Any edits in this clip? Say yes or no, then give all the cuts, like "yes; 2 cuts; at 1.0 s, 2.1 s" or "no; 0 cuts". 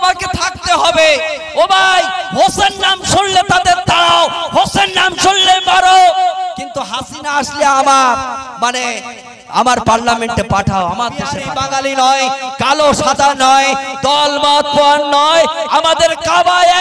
yes; 1 cut; at 11.5 s